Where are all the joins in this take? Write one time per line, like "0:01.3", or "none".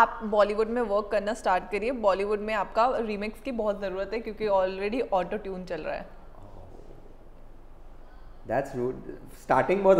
none